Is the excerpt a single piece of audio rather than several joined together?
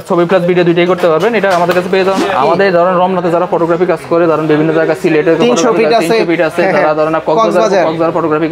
no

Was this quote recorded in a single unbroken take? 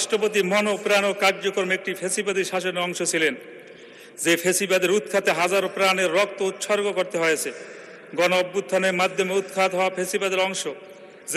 yes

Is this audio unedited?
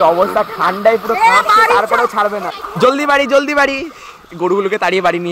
no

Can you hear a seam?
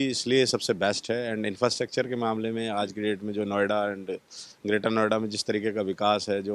no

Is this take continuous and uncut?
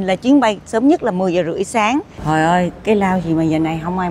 no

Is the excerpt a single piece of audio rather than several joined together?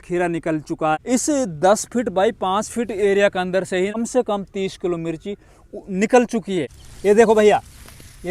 no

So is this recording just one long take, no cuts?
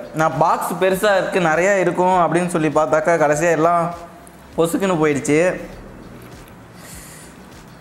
yes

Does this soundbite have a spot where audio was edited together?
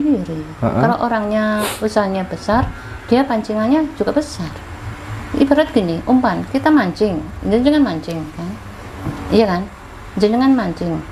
no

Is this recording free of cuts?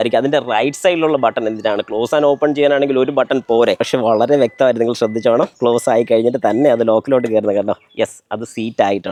yes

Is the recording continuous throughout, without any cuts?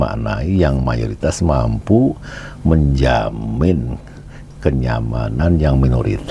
yes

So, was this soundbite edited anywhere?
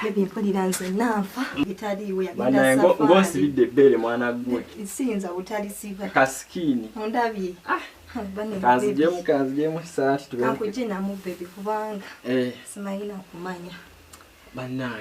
yes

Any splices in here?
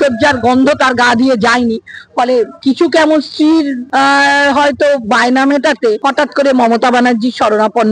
yes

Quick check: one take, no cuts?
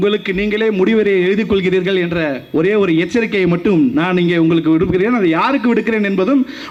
yes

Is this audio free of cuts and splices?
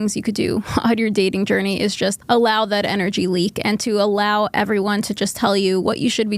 no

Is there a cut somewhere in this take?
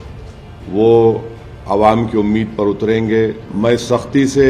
yes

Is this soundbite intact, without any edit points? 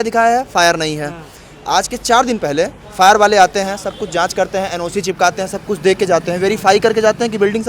yes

